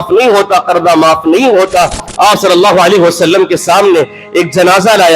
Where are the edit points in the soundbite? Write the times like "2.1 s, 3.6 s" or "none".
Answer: 2.0 s